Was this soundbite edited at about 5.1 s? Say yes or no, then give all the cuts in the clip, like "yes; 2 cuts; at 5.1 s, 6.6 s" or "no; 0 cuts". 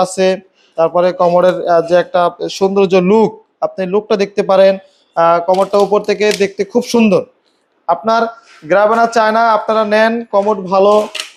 no; 0 cuts